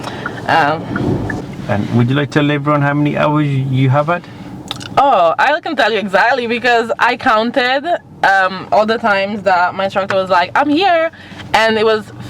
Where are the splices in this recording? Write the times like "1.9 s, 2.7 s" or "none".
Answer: 1.4 s